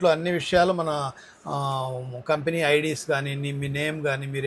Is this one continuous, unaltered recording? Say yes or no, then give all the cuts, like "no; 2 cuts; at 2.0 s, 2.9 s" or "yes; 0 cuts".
yes; 0 cuts